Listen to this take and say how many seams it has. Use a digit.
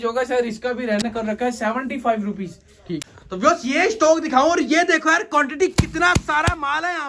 2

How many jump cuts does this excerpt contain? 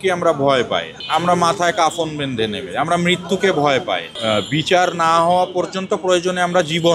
2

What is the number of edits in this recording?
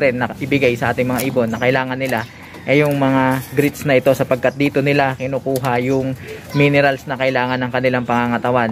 0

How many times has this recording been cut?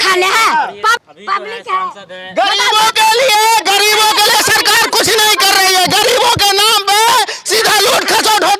1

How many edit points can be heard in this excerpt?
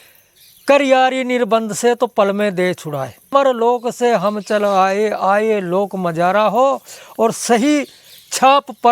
1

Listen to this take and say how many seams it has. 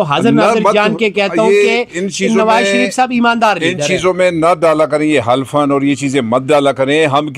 0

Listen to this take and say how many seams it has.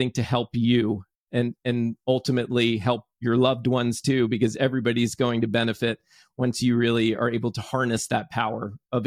0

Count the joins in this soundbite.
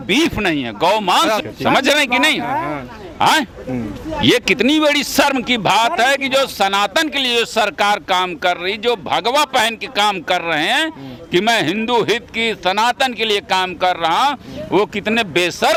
0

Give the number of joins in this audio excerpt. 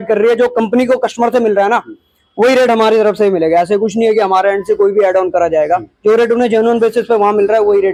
0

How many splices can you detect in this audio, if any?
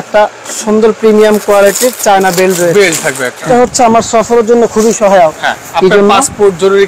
1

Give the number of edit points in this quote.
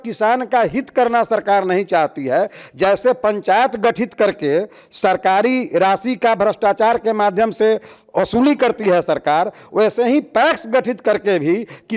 0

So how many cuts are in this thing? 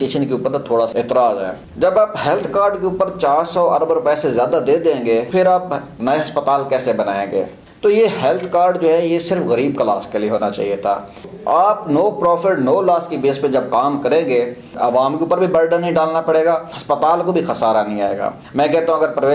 8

